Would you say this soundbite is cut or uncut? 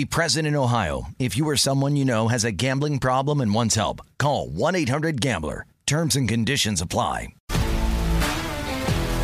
cut